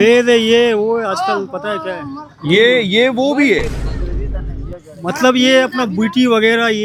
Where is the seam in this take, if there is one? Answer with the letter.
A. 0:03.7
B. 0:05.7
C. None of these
C